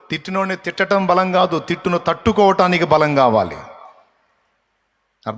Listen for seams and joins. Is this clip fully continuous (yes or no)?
yes